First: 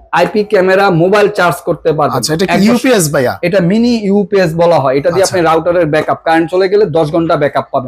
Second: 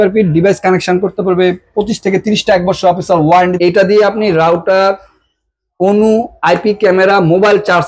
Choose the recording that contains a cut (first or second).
second